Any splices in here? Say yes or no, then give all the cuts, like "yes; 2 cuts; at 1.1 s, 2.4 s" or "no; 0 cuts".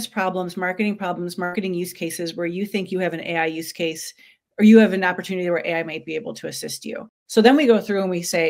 yes; 1 cut; at 7.1 s